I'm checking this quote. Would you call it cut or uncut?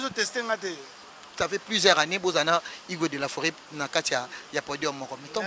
cut